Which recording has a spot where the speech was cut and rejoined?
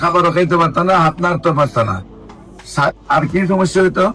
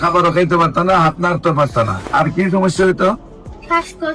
second; 1 cut; at 2.0 s

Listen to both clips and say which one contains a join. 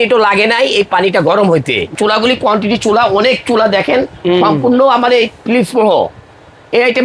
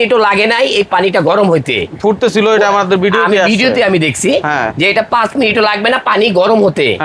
first; 1 cut; at 1.9 s

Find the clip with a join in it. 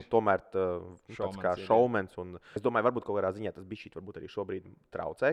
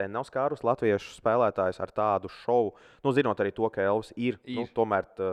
first; 1 cut; at 2.5 s

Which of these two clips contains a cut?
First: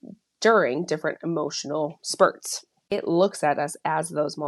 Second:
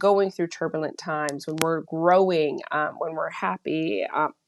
first; 1 cut; at 2.9 s

